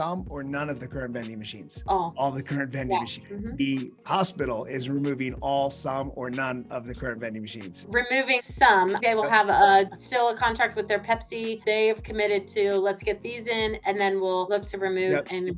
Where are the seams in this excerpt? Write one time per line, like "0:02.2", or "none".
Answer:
none